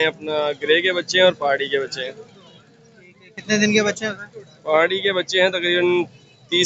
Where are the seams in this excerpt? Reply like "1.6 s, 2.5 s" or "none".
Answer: none

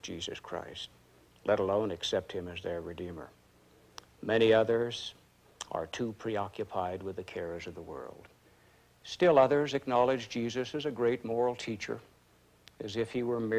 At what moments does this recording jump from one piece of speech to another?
none

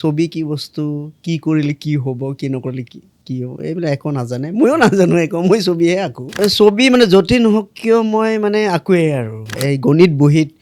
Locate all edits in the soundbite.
6.4 s, 9.6 s

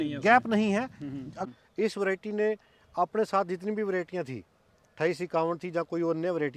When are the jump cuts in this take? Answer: 1.5 s

